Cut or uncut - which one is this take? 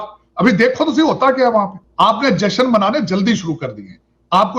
cut